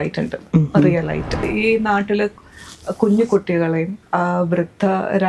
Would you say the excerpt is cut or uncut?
cut